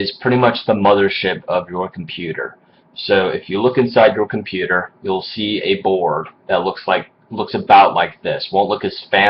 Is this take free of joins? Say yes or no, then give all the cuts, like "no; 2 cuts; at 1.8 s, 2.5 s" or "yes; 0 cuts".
no; 1 cut; at 2.2 s